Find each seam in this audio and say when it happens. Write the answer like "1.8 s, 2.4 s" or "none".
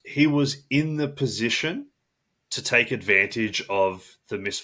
none